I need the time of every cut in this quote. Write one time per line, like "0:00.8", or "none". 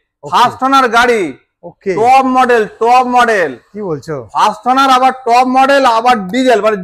none